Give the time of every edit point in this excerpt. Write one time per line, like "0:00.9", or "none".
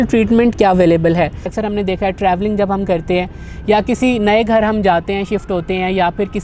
0:01.5